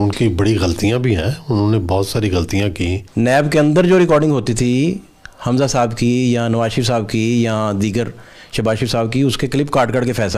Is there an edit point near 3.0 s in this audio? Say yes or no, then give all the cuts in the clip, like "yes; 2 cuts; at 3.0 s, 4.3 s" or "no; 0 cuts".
yes; 1 cut; at 3.0 s